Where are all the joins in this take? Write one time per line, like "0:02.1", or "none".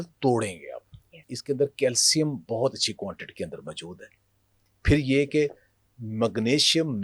0:01.3